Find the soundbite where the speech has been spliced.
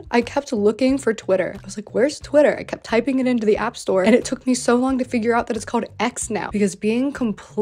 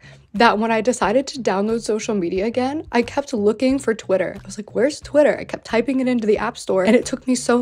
first; 1 cut; at 6.5 s

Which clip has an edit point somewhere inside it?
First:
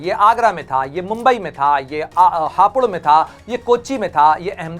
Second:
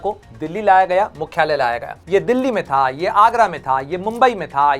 second; 1 cut; at 2.0 s

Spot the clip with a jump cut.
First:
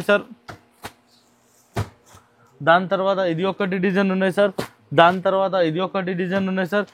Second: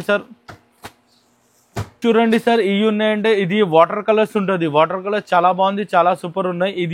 second; 1 cut; at 1.8 s

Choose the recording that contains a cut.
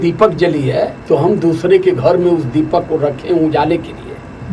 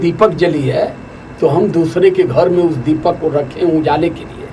first; 1 cut; at 1.0 s

